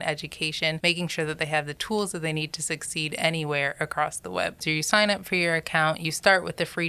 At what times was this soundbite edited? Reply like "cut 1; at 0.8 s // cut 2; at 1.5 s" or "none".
cut 1; at 0.8 s // cut 2; at 1.8 s // cut 3; at 4.6 s